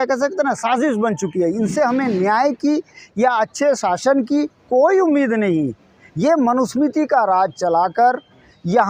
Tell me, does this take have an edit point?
no; 0 cuts

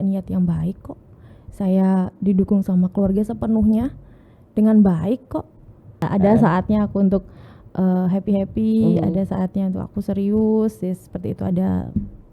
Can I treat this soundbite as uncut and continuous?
no; 1 cut; at 6.1 s

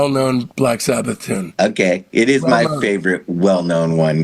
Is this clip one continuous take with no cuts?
no; 1 cut; at 1.5 s

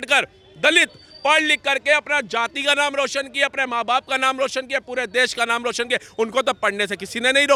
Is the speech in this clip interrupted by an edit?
no; 0 cuts

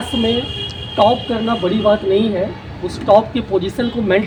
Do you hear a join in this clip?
no; 0 cuts

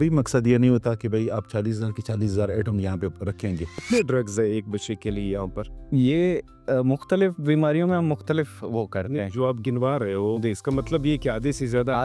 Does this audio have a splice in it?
yes; 1 cut; at 3.8 s

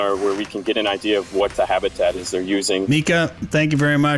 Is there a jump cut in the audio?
yes; 1 cut; at 2.9 s

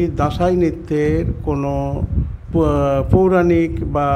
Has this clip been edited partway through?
no; 0 cuts

